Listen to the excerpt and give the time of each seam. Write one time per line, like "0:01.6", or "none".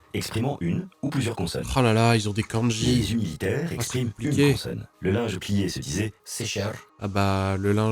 none